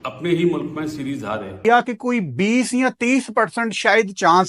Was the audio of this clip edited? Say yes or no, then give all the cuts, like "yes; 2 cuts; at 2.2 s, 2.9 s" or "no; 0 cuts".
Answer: yes; 1 cut; at 1.6 s